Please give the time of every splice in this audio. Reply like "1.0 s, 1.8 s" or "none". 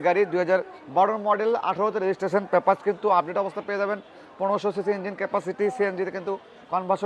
none